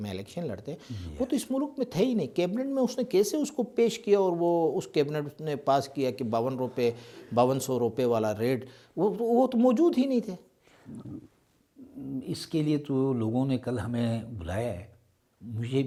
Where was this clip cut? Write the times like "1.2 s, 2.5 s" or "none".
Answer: none